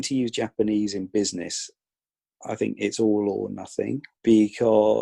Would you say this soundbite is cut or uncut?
cut